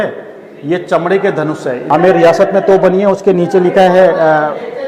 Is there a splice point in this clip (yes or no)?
yes